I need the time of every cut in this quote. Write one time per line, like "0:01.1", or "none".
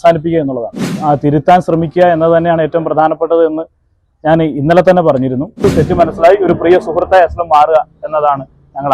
0:01.0
0:05.6